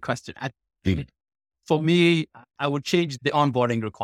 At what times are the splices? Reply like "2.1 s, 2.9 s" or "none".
2.5 s